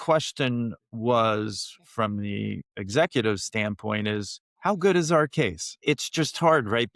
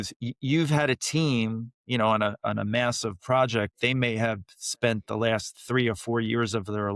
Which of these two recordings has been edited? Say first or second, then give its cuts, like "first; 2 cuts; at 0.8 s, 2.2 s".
first; 2 cuts; at 4.4 s, 5.8 s